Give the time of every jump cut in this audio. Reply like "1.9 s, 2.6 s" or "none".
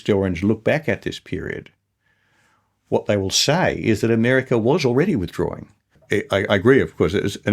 5.9 s